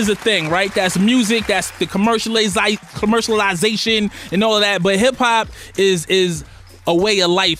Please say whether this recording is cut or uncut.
uncut